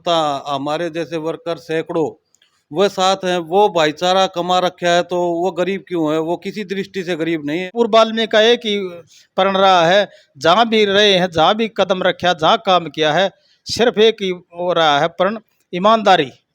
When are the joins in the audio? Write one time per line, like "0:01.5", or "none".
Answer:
0:07.7